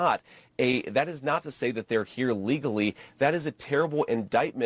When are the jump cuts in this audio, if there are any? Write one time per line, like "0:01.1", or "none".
none